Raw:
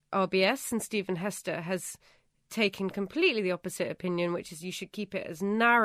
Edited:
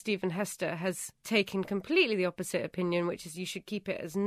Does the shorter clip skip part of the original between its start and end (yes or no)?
yes